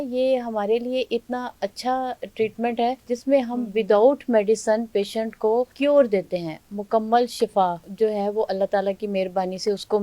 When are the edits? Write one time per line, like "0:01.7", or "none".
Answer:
0:03.0
0:05.7

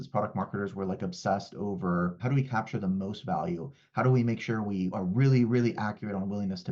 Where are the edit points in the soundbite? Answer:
0:02.2
0:04.9

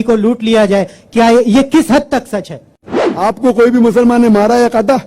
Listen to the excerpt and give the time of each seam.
0:03.0

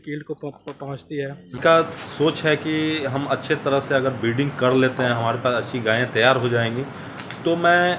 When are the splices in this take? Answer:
0:01.6

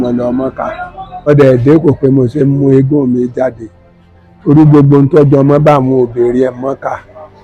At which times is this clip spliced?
0:01.3

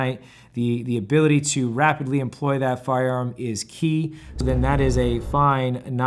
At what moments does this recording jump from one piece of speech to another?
0:04.4

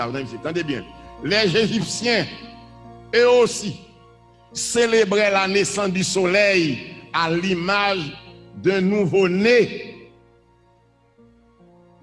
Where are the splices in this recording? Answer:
0:10.0

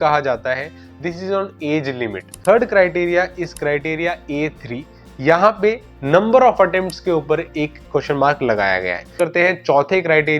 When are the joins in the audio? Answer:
0:02.3
0:09.1

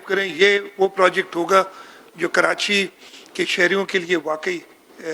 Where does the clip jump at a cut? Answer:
none

